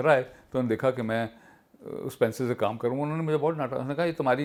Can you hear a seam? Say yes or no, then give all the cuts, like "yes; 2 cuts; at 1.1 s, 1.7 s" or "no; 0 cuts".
no; 0 cuts